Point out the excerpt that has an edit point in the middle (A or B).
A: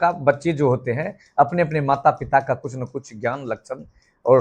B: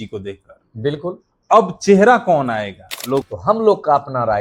B